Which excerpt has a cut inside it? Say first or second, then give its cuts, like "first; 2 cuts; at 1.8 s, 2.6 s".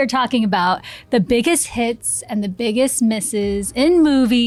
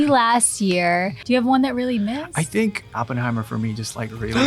second; 2 cuts; at 1.2 s, 2.9 s